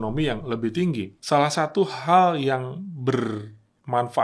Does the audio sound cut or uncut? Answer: cut